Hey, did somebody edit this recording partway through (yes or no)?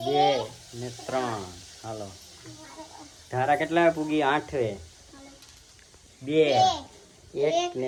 no